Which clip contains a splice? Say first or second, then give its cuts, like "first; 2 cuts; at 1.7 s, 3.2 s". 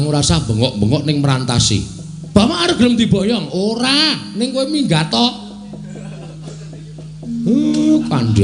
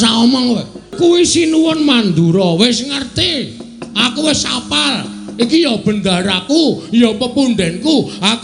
second; 1 cut; at 0.9 s